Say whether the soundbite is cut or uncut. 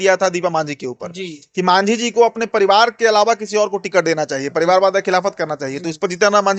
uncut